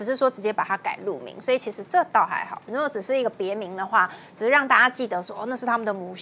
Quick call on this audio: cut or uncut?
uncut